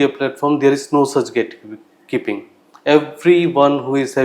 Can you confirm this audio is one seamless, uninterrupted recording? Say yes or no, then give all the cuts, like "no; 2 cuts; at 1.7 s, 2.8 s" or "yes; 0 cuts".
yes; 0 cuts